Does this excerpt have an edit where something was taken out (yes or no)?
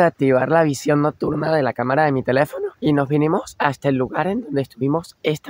no